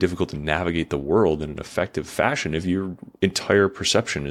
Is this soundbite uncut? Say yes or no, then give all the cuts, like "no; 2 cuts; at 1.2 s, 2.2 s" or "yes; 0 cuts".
yes; 0 cuts